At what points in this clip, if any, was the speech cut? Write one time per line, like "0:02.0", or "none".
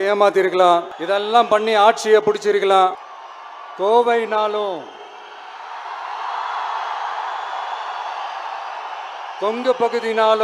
0:00.9
0:03.0